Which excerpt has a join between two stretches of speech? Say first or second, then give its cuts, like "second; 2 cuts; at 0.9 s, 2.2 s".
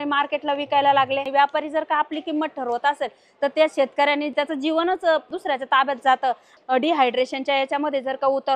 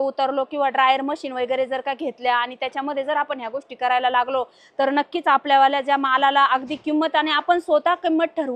first; 4 cuts; at 1.3 s, 4.3 s, 5.3 s, 6.5 s